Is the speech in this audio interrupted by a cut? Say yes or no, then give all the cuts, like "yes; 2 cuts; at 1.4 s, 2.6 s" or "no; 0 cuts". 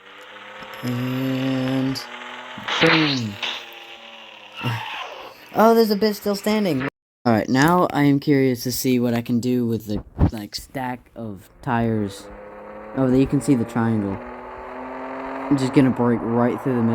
yes; 1 cut; at 6.9 s